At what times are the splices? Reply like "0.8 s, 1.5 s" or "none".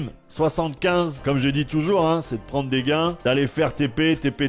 1.2 s